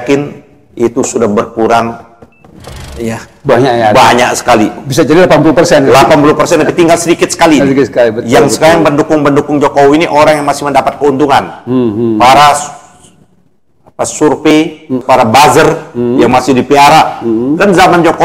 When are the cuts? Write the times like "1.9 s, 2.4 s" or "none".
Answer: 15.0 s

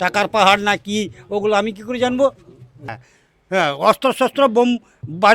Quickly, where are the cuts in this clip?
2.9 s

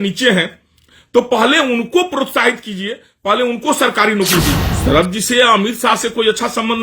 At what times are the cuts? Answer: 4.7 s

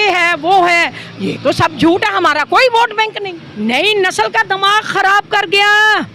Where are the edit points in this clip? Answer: 3.1 s

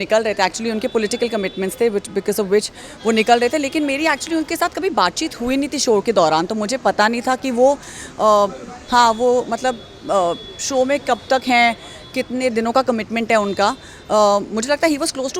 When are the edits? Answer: none

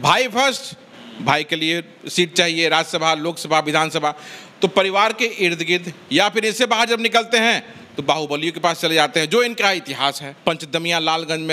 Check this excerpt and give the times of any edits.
10.3 s

